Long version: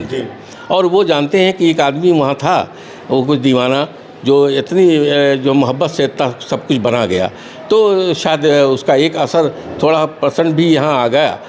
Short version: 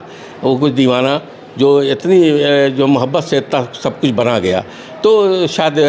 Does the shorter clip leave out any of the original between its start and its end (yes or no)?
no